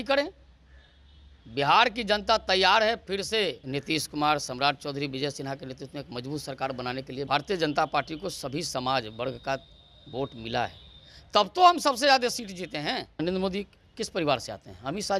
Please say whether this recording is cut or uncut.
cut